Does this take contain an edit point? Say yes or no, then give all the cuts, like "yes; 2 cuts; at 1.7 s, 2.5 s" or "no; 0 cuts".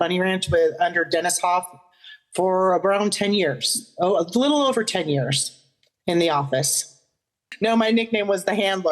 yes; 1 cut; at 7.5 s